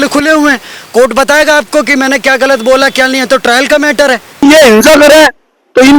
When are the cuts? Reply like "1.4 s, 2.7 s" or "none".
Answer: 4.4 s